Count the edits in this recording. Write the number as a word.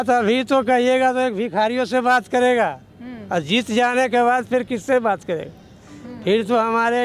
zero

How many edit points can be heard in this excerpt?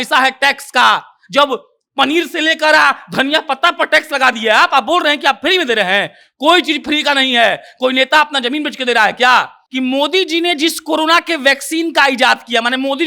one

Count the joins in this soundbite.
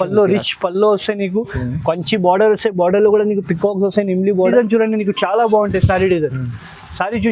one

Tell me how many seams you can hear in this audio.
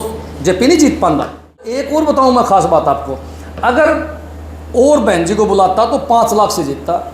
one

